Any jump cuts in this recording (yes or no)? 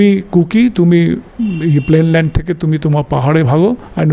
no